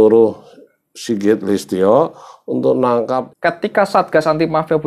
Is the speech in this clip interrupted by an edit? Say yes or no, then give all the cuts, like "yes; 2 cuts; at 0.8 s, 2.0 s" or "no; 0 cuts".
yes; 1 cut; at 3.3 s